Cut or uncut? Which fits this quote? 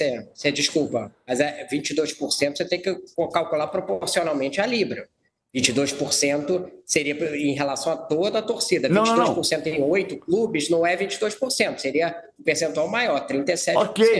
uncut